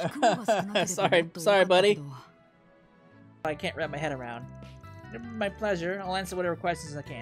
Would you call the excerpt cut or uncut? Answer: cut